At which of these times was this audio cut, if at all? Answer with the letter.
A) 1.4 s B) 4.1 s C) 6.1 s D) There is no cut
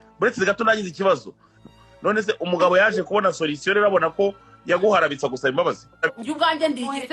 C